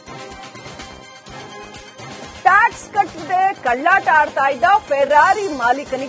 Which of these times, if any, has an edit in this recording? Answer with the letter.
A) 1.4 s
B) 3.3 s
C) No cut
A